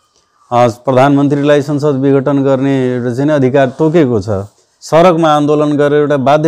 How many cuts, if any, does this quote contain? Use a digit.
1